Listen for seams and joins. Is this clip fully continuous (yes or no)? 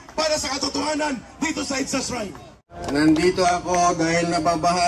no